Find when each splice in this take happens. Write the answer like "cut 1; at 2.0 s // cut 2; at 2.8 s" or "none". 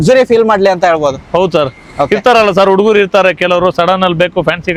none